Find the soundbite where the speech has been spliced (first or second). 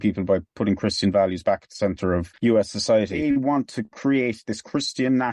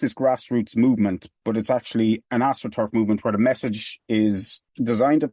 first